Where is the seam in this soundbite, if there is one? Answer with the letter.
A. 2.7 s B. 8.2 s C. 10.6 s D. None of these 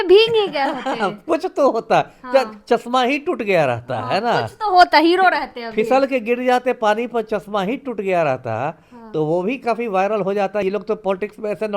C